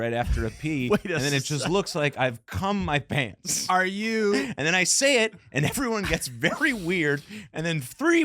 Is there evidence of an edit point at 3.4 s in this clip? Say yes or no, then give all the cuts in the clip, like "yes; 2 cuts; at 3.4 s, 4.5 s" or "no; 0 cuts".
yes; 1 cut; at 3.4 s